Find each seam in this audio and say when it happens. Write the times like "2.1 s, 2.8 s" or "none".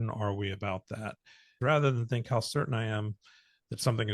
1.6 s